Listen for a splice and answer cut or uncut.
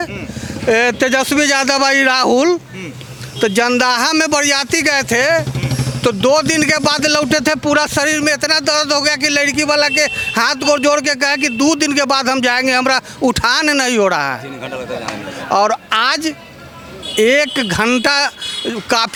uncut